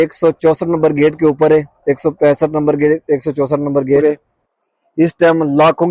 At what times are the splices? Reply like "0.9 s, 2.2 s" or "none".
4.0 s